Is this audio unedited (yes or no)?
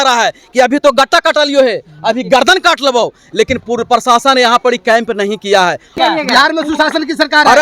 no